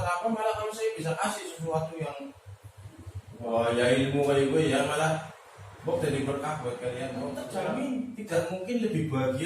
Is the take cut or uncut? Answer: cut